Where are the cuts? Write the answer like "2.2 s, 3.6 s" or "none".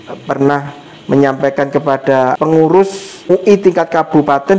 2.3 s, 3.3 s